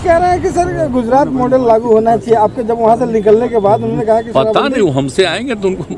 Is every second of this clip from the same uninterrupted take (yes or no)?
yes